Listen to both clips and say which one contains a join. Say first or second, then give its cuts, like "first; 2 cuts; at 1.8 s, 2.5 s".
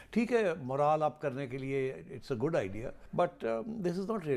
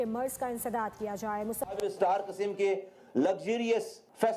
second; 1 cut; at 1.7 s